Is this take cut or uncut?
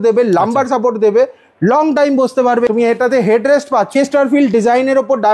cut